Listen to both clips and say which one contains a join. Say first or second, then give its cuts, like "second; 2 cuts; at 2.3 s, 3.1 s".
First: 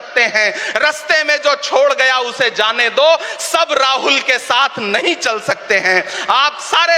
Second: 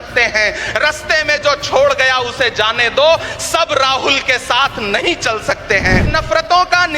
second; 1 cut; at 6.1 s